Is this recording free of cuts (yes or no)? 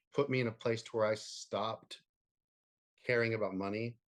yes